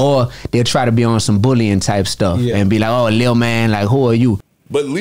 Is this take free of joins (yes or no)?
yes